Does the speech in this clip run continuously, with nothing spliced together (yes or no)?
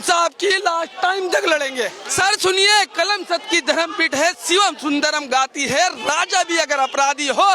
no